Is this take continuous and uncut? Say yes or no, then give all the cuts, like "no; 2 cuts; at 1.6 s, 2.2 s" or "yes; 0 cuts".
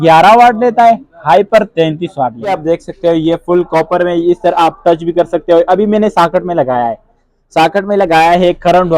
no; 1 cut; at 2.5 s